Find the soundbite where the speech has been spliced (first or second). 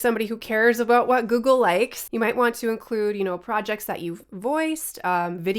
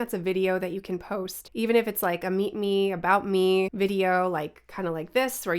second